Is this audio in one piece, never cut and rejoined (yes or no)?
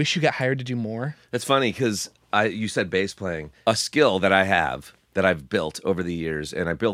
yes